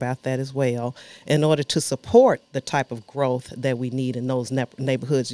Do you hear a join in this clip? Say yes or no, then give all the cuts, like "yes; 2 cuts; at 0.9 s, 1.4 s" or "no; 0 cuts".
no; 0 cuts